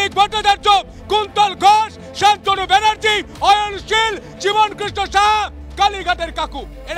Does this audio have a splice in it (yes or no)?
no